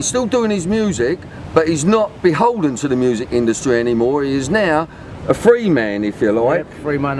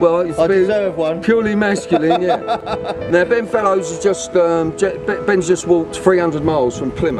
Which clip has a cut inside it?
first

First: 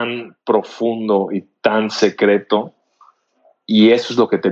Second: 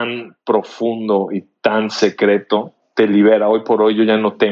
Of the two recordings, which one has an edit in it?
second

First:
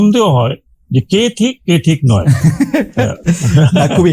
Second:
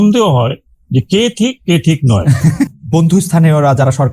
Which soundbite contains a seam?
second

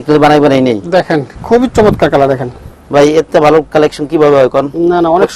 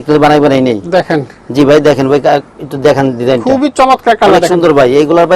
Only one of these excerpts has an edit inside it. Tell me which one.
first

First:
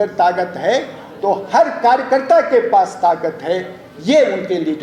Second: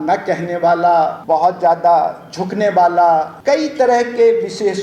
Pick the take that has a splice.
second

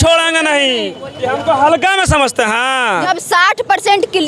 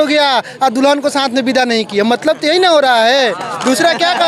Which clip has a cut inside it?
first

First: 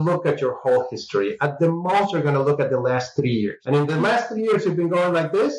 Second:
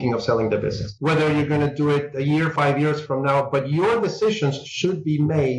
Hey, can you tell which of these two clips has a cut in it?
second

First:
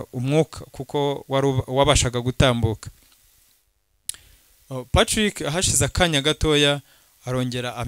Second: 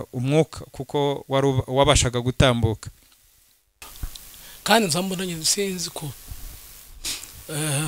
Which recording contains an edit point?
second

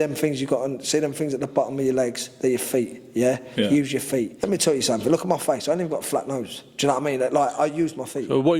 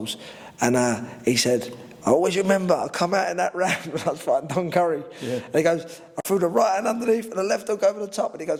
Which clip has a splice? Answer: first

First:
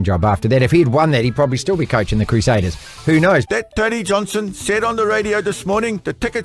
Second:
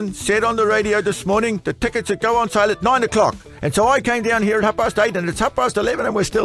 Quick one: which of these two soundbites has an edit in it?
first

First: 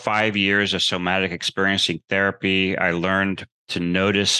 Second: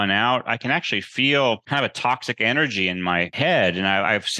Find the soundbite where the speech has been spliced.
second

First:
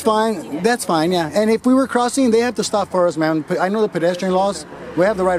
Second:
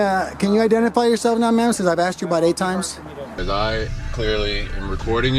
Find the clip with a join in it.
second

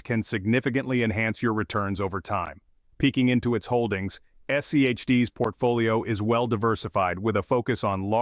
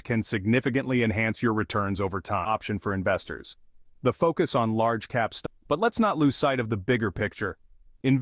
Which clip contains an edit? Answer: second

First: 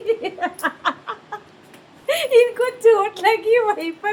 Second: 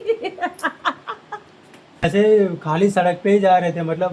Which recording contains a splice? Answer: second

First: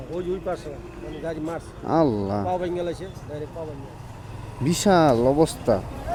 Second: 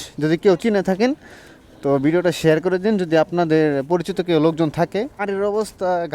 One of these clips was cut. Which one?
second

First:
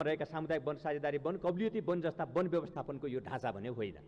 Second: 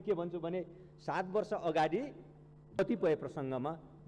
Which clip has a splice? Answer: second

